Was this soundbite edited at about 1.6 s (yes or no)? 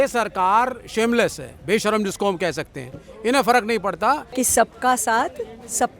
no